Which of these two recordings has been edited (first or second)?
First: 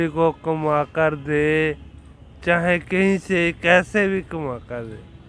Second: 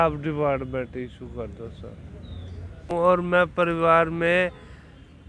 second